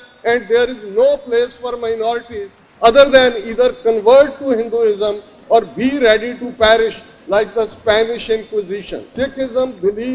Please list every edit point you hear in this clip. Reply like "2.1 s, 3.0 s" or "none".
9.0 s

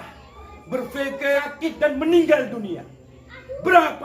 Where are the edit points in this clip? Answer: 1.4 s

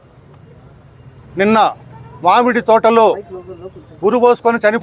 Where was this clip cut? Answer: none

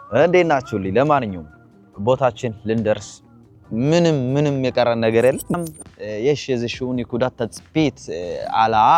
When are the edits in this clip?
5.6 s

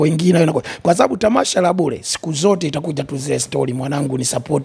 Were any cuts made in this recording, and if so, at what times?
none

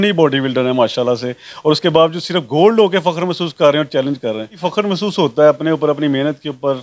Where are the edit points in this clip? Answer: 4.6 s

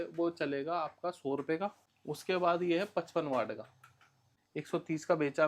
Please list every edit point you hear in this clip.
1.9 s, 4.4 s

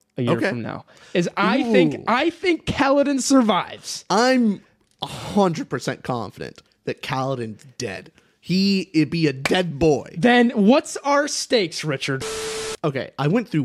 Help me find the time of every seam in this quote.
12.3 s

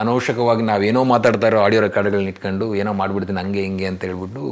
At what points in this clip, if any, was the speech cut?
none

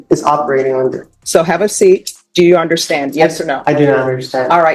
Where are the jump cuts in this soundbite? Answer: 1.1 s, 2.2 s

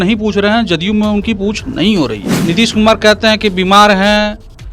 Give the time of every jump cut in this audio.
2.3 s

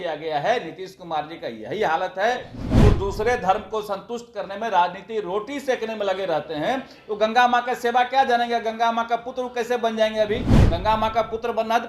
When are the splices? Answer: 2.6 s

